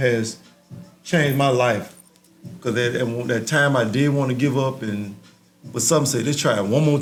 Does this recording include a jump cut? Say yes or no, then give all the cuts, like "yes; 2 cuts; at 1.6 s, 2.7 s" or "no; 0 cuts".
no; 0 cuts